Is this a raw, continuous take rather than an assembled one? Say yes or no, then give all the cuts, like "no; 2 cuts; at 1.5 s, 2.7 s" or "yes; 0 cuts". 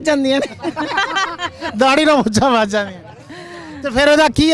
yes; 0 cuts